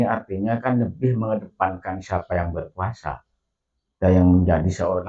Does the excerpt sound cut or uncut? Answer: uncut